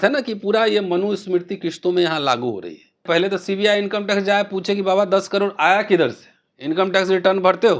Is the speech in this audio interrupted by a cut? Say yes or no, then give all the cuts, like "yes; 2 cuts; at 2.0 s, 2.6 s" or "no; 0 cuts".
yes; 1 cut; at 3.0 s